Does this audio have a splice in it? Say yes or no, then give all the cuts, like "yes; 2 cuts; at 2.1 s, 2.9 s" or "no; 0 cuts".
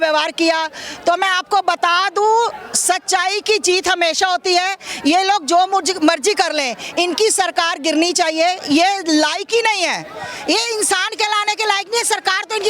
no; 0 cuts